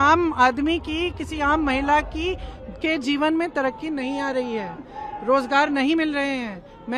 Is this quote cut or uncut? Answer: uncut